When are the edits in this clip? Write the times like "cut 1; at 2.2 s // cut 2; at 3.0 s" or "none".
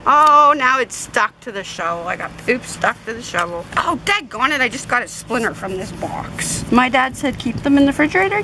cut 1; at 3.7 s // cut 2; at 6.6 s